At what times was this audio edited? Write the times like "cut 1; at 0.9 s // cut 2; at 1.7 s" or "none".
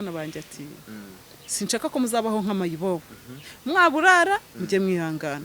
none